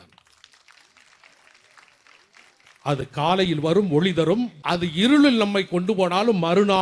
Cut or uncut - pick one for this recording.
cut